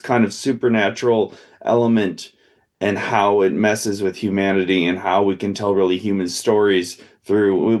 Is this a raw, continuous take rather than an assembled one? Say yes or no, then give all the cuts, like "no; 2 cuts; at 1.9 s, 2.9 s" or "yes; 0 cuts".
yes; 0 cuts